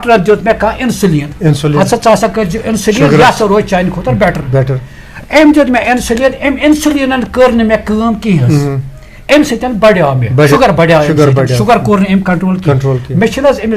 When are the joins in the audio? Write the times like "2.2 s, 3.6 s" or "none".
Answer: 10.5 s

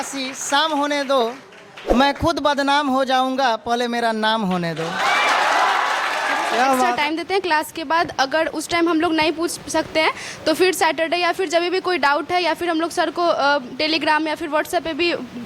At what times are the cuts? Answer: 6.9 s

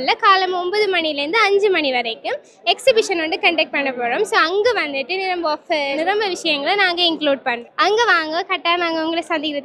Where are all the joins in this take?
5.9 s, 7.6 s

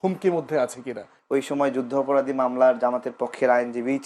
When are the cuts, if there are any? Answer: 1.1 s

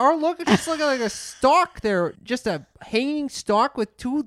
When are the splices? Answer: 2.2 s

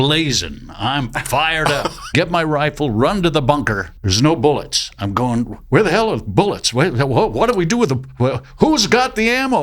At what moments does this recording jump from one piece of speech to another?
2.0 s, 3.9 s

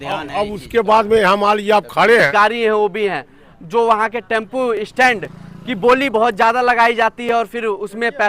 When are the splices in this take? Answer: 2.3 s

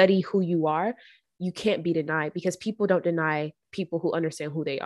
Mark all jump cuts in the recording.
none

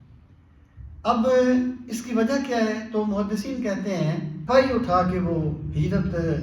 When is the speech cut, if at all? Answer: 4.4 s

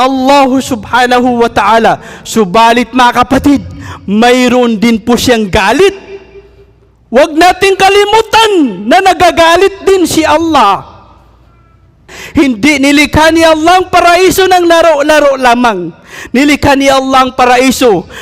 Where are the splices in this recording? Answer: 12.2 s

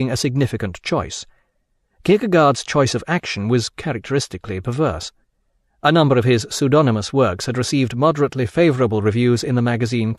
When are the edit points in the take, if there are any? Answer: 1.7 s

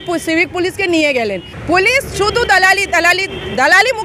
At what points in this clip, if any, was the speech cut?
1.5 s

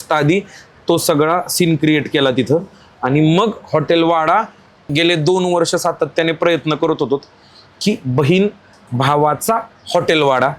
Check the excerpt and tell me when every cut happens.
4.9 s

